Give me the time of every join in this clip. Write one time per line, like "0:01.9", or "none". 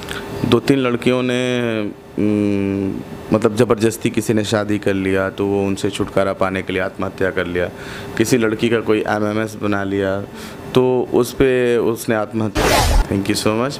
0:12.7